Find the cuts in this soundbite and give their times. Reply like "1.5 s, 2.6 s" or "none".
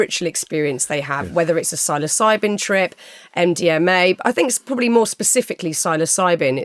none

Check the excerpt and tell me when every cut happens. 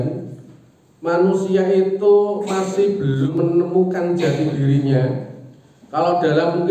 3.3 s

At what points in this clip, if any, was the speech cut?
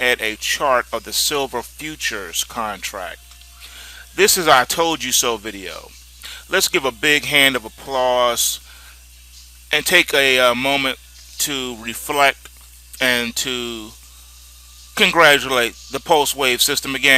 10.6 s

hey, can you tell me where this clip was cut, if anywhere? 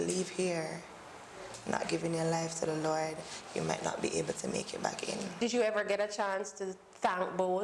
5.4 s

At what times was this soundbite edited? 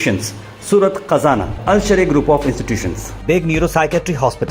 none

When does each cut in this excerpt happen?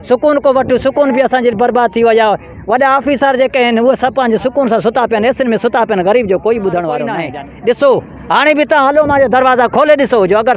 7.3 s

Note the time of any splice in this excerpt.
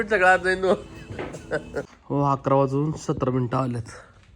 2.0 s

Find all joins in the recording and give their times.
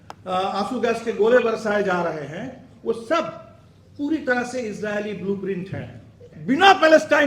6.3 s

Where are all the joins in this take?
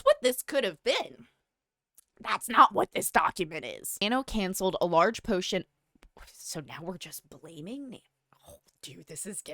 4.0 s

